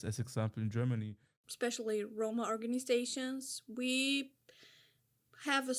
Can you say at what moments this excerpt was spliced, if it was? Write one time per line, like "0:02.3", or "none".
0:01.4